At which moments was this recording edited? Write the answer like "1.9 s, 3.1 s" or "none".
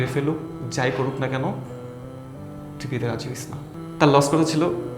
3.7 s